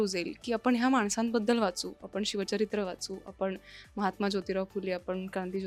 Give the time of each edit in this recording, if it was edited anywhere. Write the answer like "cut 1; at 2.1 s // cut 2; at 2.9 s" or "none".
none